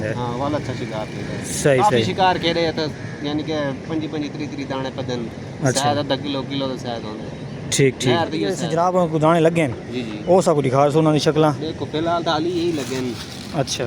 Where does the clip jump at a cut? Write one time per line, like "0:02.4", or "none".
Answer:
0:08.6